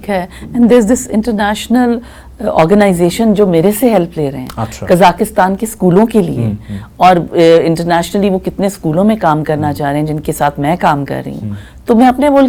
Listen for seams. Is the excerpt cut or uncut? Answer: uncut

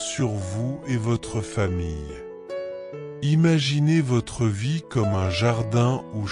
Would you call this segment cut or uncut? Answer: cut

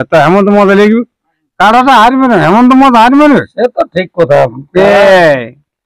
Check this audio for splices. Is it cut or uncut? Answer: uncut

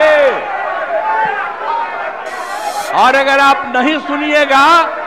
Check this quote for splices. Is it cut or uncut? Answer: uncut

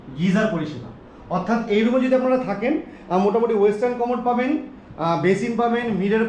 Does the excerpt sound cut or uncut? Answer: uncut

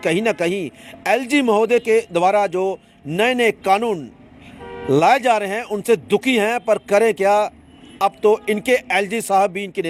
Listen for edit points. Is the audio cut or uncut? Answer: uncut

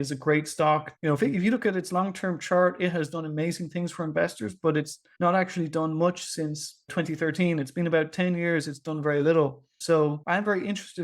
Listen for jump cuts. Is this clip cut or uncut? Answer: cut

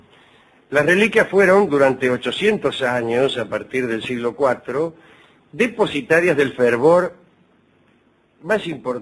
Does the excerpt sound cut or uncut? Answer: cut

